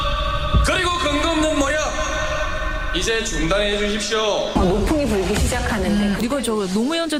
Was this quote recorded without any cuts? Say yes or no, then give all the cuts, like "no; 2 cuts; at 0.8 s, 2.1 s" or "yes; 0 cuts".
yes; 0 cuts